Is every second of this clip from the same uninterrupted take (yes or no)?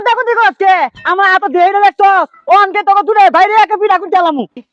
yes